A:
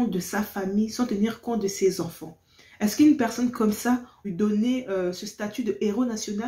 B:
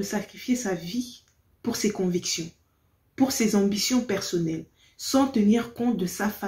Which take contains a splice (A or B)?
A